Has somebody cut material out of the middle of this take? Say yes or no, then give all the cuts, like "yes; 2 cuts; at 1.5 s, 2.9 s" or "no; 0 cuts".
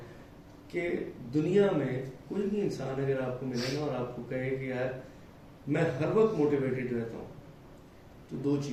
no; 0 cuts